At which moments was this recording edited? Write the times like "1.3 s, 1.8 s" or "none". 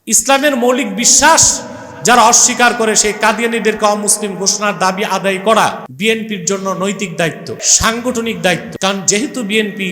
5.9 s, 7.7 s, 8.7 s